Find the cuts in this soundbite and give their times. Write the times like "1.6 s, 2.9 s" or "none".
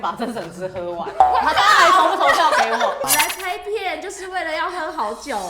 3.1 s